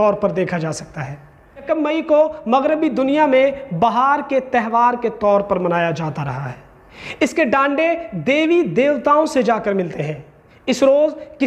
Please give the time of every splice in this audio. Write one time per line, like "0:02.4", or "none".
0:01.6